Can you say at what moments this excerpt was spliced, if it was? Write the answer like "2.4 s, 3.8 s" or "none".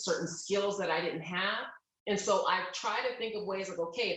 none